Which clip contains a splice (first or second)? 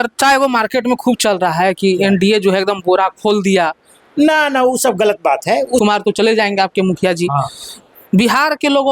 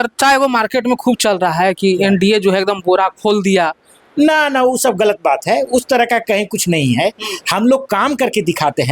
first